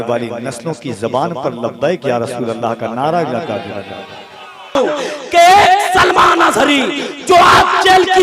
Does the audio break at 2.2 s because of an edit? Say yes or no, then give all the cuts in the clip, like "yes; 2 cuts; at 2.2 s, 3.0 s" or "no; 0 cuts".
no; 1 cut; at 4.8 s